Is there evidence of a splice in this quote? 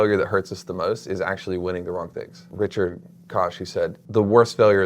yes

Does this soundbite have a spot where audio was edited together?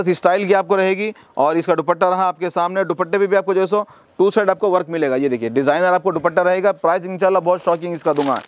no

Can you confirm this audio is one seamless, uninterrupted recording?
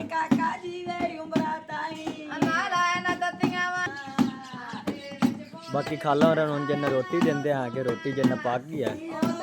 no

